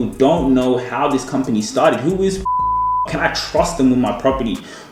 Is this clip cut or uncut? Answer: uncut